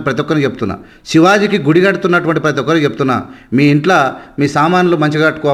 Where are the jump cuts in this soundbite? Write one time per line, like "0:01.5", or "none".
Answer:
none

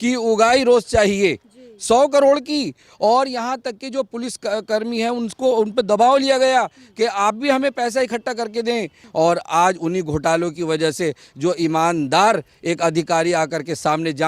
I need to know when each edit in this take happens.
0:09.0

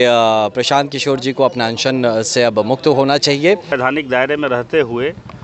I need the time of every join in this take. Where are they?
0:03.7

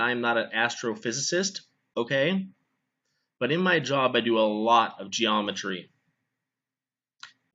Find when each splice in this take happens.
0:01.6

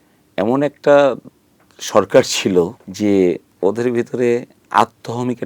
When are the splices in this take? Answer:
0:02.8
0:03.5

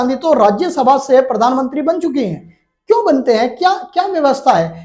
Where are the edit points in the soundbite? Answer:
none

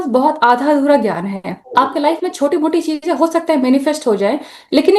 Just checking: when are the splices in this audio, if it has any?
none

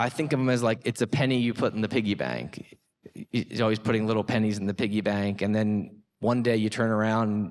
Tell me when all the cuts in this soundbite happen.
none

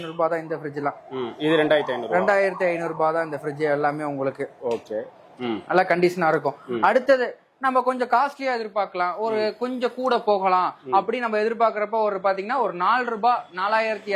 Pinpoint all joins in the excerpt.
none

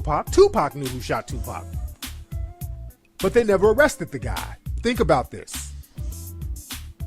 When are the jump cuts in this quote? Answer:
0:03.6

